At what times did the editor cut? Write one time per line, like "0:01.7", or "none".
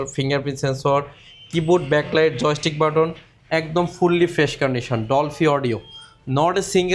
none